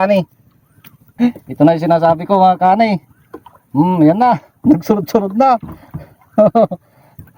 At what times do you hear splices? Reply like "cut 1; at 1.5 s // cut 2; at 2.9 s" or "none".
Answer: cut 1; at 1.1 s